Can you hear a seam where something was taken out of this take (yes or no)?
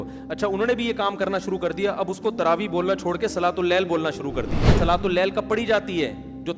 yes